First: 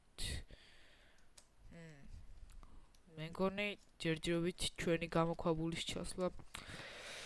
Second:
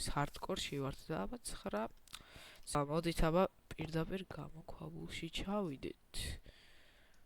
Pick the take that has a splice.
second; 1 cut; at 2.8 s

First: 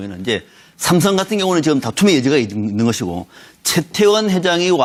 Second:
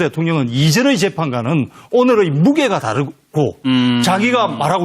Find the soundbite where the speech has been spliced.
second; 1 cut; at 1.8 s

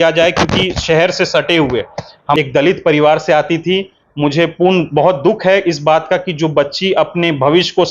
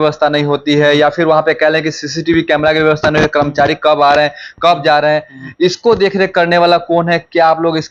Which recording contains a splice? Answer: first; 1 cut; at 2.4 s

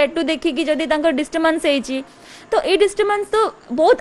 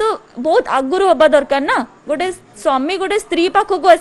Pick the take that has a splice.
second; 1 cut; at 1.9 s

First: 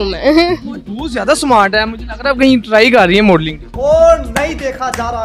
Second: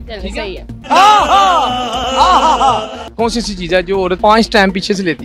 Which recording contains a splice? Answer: second; 2 cuts; at 3.0 s, 4.2 s

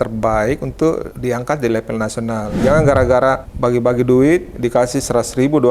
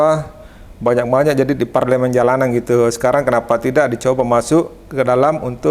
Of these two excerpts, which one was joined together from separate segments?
first; 3 cuts; at 1.1 s, 2.5 s, 3.5 s

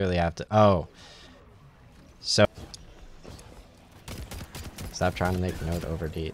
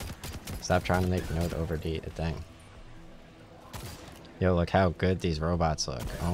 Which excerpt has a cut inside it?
first; 1 cut; at 2.4 s

